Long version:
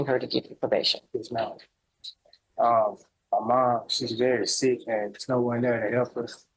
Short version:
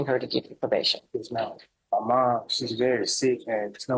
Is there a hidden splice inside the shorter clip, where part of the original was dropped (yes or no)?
yes